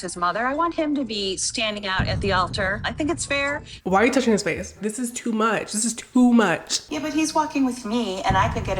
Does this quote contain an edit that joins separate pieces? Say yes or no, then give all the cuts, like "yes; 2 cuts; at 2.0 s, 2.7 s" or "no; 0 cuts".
yes; 2 cuts; at 3.7 s, 6.7 s